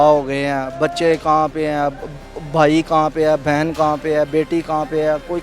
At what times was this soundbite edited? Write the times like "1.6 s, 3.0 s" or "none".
none